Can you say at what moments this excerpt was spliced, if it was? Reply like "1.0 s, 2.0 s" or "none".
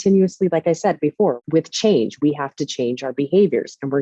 1.4 s